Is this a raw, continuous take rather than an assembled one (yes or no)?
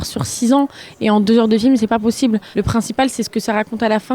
no